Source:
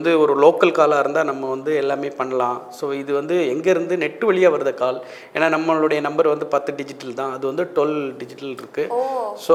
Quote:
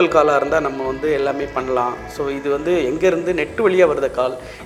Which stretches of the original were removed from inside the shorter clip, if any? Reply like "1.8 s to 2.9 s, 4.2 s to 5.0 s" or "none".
none